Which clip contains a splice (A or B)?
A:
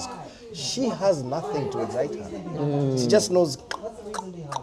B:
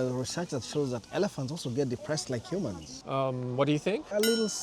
B